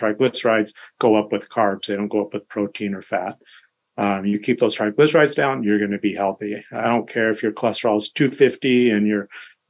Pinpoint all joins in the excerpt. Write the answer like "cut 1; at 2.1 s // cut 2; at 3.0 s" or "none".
none